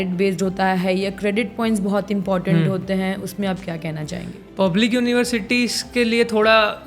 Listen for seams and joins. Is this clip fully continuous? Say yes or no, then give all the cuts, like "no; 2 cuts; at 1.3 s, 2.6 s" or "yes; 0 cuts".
yes; 0 cuts